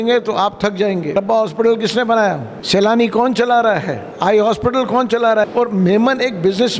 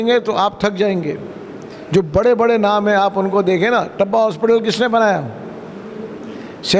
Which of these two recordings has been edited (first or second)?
first